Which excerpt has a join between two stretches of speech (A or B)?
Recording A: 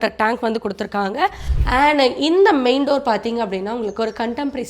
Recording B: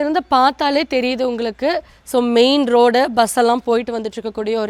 A